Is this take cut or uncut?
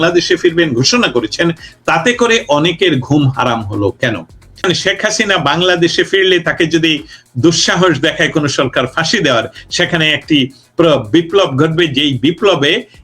cut